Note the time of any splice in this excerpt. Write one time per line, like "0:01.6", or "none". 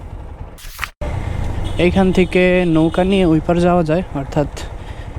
0:01.0